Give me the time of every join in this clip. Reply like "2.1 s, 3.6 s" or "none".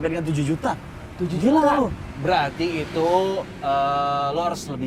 none

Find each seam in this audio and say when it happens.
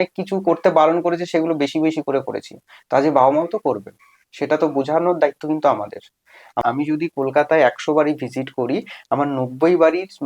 6.6 s

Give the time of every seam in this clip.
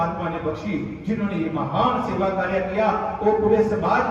none

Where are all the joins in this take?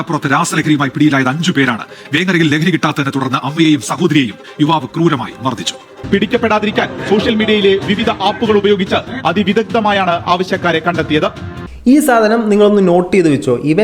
5.9 s

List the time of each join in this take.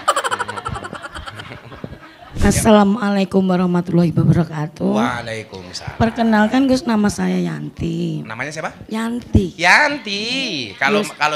none

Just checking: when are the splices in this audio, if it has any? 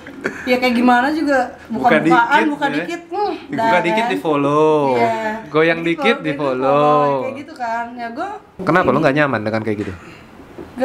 none

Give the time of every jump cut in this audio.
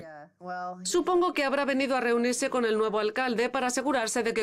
none

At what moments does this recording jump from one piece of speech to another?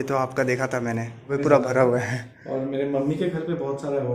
1.3 s

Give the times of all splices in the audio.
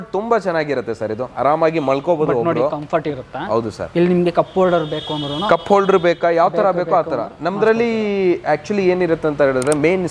none

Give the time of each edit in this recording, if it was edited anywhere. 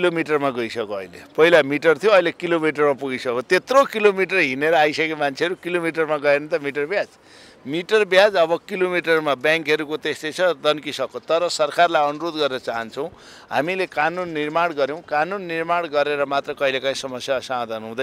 none

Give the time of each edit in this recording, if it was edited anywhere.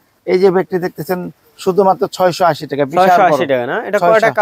none

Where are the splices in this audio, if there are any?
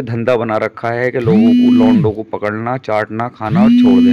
none

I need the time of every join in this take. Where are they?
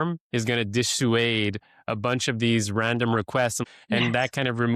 3.6 s

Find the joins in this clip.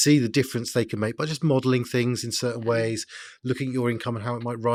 none

